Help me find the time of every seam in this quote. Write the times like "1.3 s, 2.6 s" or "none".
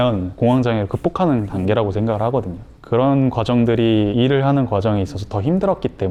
none